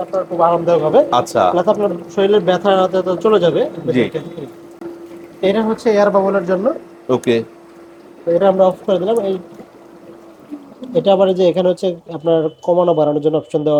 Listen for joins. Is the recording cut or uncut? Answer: uncut